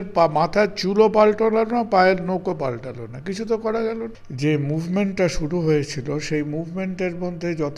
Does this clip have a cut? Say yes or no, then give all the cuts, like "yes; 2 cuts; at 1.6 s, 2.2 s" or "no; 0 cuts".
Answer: yes; 1 cut; at 4.2 s